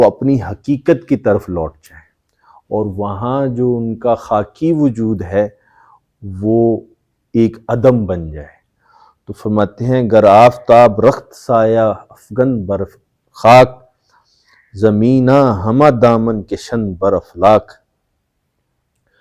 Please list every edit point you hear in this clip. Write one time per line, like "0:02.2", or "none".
none